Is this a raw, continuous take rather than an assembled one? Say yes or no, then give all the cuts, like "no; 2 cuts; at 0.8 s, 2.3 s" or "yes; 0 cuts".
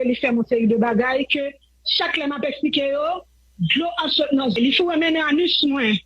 no; 1 cut; at 4.5 s